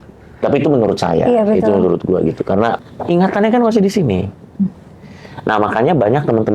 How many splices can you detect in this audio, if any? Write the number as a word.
one